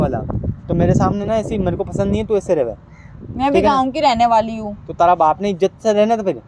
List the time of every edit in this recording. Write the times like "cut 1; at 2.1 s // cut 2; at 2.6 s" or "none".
none